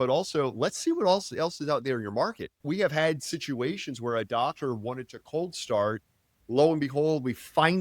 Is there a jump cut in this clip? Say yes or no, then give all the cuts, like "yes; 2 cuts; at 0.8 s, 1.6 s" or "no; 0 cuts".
yes; 1 cut; at 2.6 s